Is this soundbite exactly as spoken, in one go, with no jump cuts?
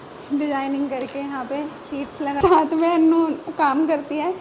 no; 1 cut; at 2.4 s

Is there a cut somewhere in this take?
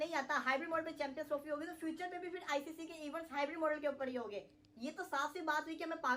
no; 0 cuts

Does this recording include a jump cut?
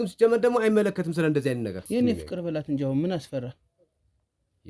yes; 1 cut; at 1.8 s

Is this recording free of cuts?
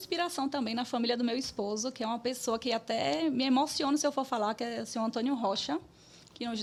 yes; 0 cuts

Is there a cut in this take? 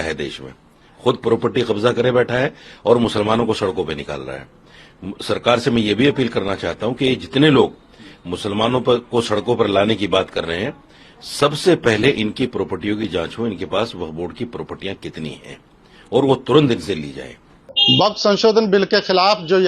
no; 0 cuts

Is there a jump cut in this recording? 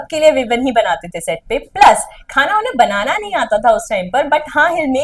no; 0 cuts

